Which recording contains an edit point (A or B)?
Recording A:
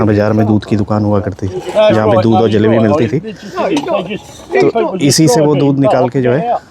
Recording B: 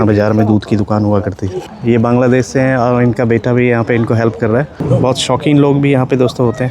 B